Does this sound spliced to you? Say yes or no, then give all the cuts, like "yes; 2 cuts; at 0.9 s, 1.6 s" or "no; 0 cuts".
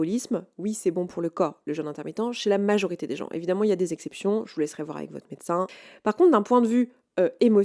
yes; 1 cut; at 5.8 s